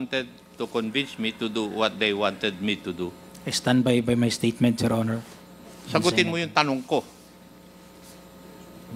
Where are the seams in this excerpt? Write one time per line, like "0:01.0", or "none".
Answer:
none